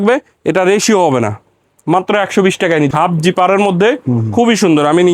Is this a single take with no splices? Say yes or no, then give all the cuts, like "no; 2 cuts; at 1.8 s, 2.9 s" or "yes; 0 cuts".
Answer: no; 1 cut; at 2.9 s